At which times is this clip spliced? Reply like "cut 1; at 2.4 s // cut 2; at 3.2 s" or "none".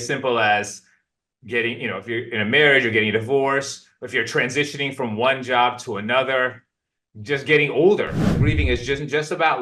cut 1; at 8.4 s